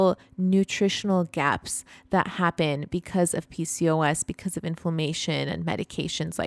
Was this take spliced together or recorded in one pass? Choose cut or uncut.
uncut